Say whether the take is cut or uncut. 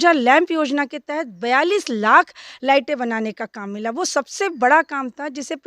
uncut